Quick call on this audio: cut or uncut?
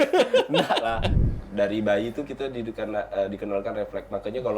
cut